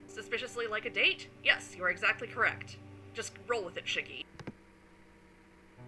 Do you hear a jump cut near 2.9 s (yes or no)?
no